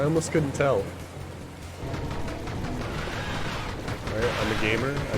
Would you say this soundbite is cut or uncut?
cut